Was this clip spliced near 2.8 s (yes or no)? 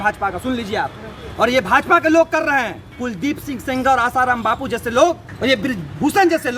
yes